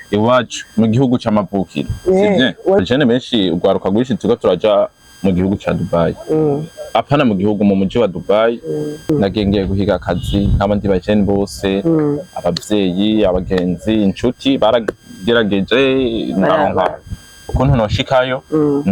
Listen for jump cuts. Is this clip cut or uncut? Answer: cut